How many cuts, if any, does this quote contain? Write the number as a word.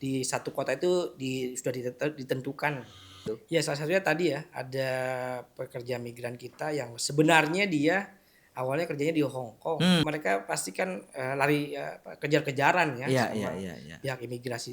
two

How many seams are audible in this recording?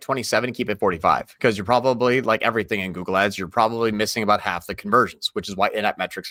zero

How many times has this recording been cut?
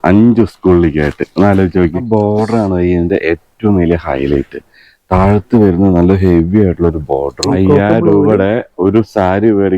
two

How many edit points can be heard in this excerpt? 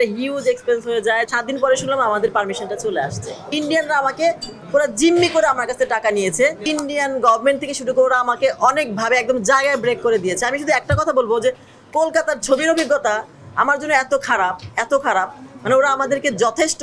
three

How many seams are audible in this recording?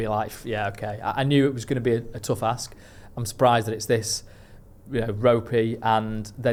zero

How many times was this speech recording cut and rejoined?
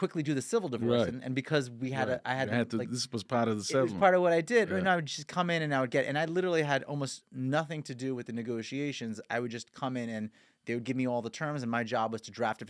zero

